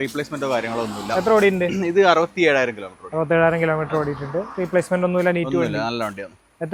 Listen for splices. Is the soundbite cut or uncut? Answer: uncut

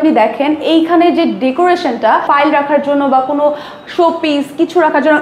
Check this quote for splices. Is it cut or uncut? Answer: cut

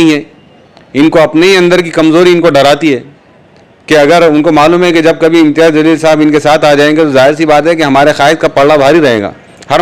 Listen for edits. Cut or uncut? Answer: uncut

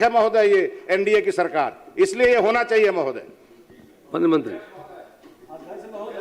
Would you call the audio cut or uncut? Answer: uncut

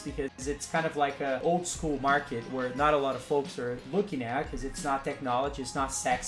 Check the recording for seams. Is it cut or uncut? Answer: cut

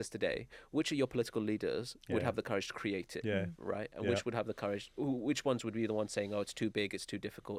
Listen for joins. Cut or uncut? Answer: uncut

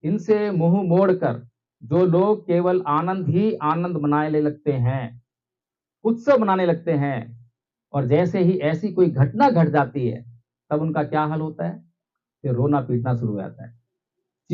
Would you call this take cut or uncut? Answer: uncut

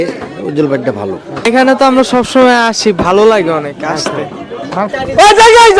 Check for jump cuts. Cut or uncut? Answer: cut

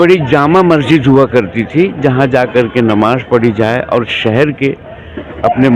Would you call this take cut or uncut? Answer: uncut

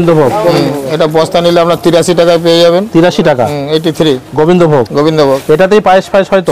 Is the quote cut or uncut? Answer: uncut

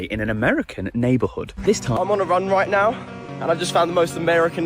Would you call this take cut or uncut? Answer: cut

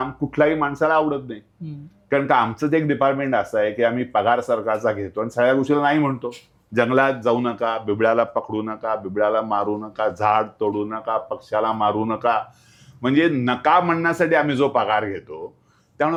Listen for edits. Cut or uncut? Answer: uncut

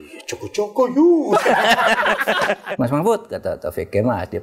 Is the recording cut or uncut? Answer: cut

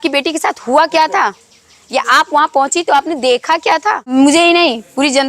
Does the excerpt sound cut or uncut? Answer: cut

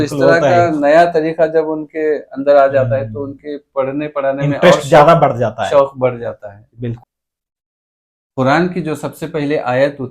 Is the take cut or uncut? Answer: cut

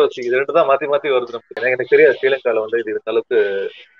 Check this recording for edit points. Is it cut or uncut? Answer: cut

